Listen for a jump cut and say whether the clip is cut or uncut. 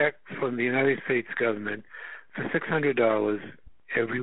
uncut